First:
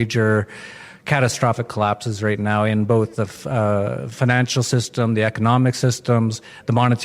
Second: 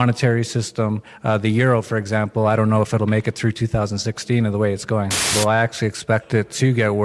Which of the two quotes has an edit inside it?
second; 1 cut; at 5.3 s

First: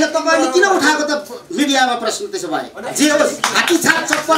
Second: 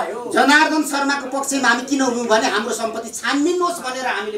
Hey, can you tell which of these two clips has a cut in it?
first; 1 cut; at 2.8 s

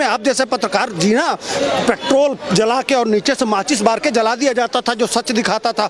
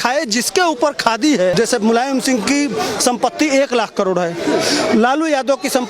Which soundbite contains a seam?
second; 1 cut; at 1.5 s

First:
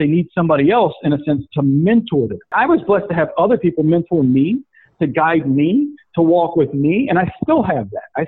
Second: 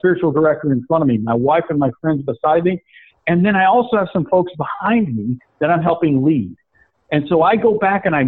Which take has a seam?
first; 1 cut; at 2.5 s

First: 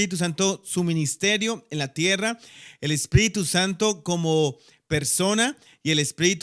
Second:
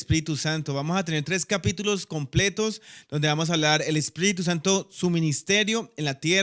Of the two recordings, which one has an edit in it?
second; 1 cut; at 1.9 s

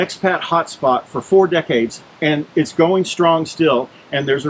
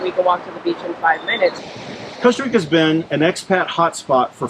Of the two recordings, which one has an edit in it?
second; 1 cut; at 1.6 s

